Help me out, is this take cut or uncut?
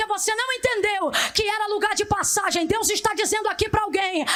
uncut